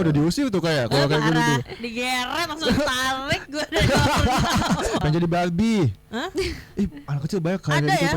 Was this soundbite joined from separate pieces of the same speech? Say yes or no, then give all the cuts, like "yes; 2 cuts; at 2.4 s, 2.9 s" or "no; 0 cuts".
yes; 1 cut; at 5.0 s